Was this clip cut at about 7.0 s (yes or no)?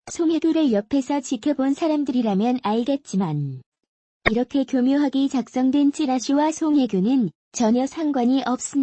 yes